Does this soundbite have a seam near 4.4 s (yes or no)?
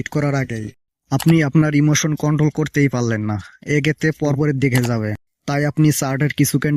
yes